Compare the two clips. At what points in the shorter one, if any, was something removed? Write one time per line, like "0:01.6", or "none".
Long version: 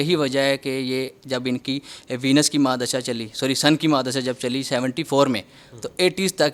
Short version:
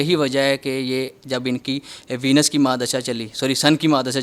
none